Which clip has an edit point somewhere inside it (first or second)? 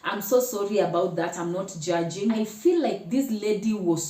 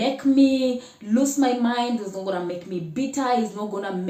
first